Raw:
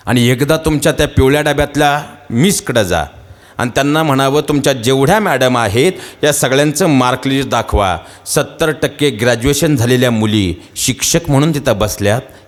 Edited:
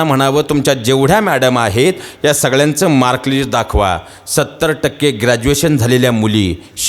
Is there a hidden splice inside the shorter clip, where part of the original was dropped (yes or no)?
no